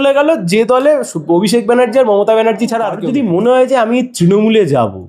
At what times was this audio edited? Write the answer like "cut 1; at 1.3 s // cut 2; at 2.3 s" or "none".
cut 1; at 3.0 s